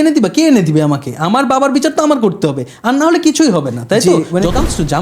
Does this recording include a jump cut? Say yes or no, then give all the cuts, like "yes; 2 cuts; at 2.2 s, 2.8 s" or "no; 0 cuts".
yes; 1 cut; at 4.0 s